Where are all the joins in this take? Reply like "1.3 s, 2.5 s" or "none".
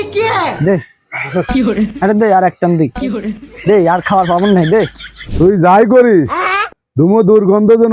5.3 s